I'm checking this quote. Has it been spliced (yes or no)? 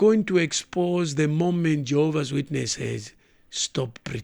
no